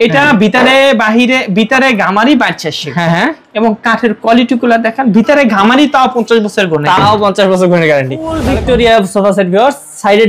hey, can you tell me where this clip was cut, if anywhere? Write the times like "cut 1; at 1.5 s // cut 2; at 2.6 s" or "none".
cut 1; at 8.4 s

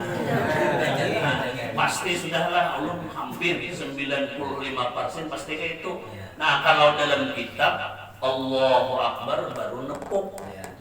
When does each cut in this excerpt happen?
none

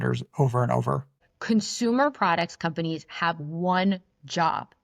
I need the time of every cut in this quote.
cut 1; at 1.2 s

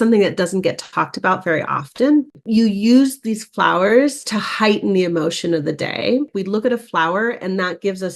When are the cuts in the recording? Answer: cut 1; at 2.4 s // cut 2; at 6.3 s

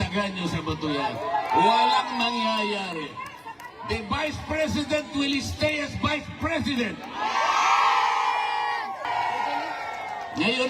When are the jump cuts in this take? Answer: cut 1; at 9.1 s

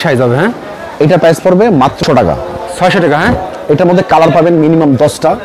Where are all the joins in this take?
cut 1; at 2.0 s

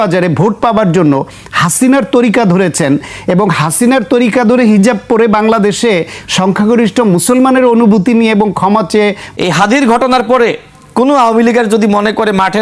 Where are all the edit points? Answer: cut 1; at 9.2 s

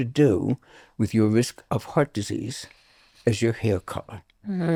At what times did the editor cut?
none

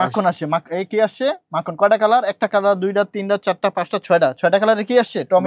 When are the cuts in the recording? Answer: none

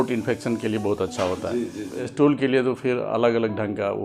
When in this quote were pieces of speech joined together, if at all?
cut 1; at 2.0 s

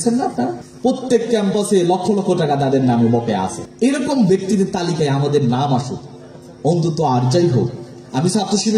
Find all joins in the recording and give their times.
none

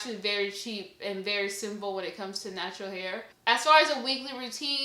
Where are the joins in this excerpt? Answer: cut 1; at 3.3 s

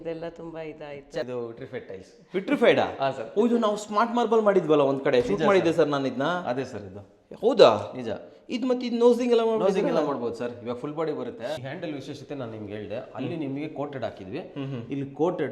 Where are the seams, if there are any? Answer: cut 1; at 1.2 s // cut 2; at 11.6 s

